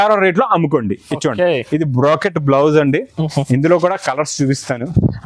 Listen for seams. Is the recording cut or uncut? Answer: uncut